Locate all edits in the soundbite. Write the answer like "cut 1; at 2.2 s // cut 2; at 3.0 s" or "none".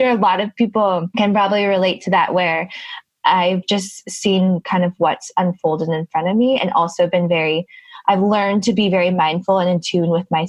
cut 1; at 1.1 s